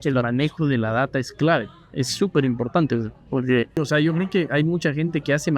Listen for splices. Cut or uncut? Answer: cut